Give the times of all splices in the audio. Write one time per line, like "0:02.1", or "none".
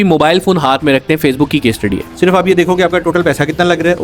0:02.0